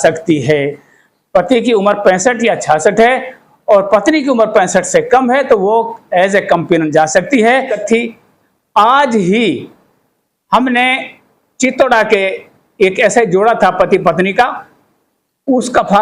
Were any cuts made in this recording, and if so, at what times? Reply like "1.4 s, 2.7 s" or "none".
7.8 s